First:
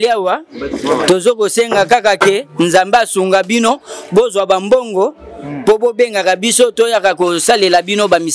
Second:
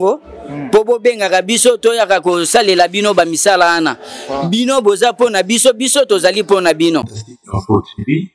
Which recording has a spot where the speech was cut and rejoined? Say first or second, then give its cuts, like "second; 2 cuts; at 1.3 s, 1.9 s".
second; 1 cut; at 7.2 s